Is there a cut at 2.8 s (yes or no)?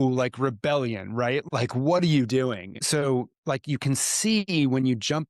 yes